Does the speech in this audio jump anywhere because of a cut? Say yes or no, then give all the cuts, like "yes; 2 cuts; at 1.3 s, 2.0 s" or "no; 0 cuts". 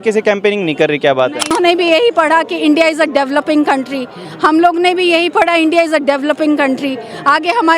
yes; 1 cut; at 1.5 s